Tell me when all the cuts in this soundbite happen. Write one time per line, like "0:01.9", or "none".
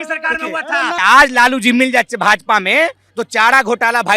0:01.0